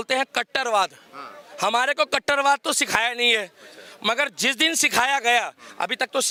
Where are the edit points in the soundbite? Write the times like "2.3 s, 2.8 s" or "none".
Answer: none

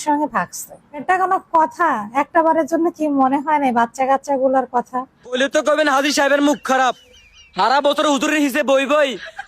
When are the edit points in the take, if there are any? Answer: 1.0 s, 5.4 s

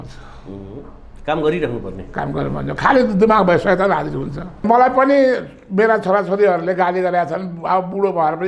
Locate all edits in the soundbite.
4.6 s

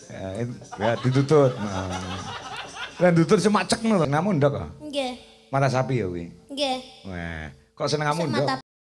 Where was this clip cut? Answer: 4.1 s

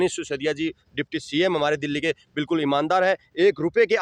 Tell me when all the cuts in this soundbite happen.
none

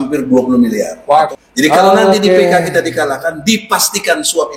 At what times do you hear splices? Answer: 1.3 s

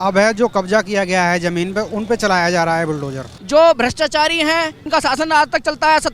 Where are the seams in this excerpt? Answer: 3.3 s, 4.8 s

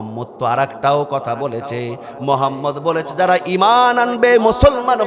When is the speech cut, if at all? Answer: none

